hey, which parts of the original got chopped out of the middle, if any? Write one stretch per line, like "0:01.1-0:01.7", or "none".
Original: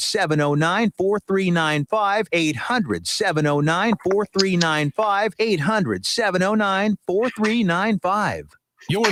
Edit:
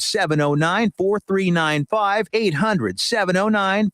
0:02.2-0:05.3